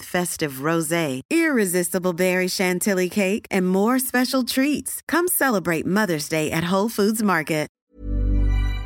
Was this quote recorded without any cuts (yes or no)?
no